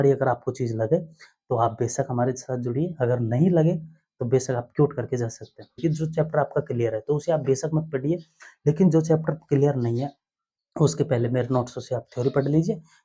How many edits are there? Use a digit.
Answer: 1